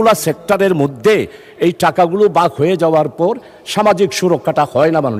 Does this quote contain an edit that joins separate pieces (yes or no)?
no